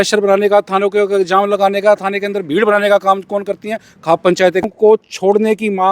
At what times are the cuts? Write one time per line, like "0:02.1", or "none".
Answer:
0:04.6